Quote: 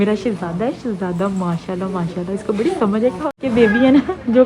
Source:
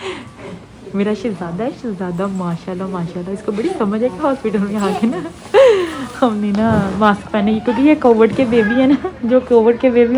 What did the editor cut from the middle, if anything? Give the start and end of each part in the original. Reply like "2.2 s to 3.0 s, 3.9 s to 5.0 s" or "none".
4.4 s to 8.4 s

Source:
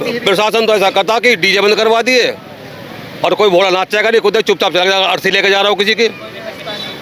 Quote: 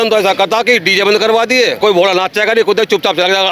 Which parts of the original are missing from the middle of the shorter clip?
2.4 s to 3.4 s

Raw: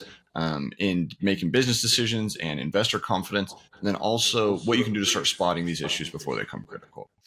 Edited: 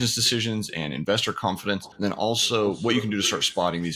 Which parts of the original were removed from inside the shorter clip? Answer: 3.5 s to 3.7 s

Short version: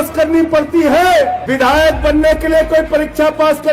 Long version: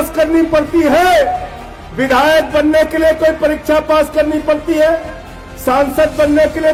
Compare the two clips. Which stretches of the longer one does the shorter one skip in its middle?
1.4 s to 1.9 s

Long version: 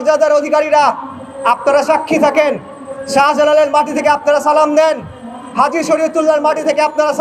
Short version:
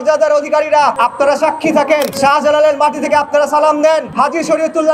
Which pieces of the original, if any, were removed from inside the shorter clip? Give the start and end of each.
0.9 s to 1.4 s, 2.6 s to 3.1 s, 5.0 s to 5.5 s

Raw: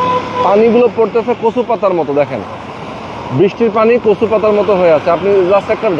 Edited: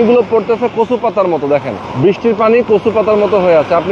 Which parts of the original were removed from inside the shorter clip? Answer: 2.5 s to 3.2 s

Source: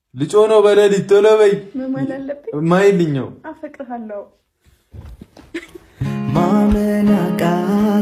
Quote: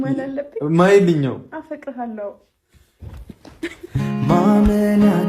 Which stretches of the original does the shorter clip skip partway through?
5.7 s to 5.9 s

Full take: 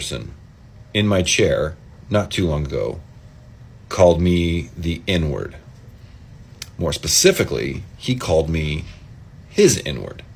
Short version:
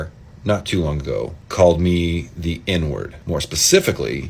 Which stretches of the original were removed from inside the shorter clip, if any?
3.1 s to 3.8 s, 5.5 s to 6.7 s

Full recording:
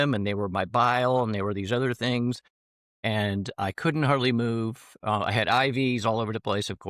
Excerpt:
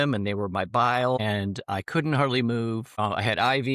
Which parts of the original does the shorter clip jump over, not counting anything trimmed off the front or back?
1.2 s to 3.1 s, 4.8 s to 5.0 s

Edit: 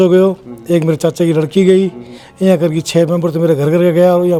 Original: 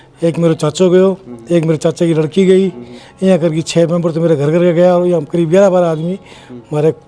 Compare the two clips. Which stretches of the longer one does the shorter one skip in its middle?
none

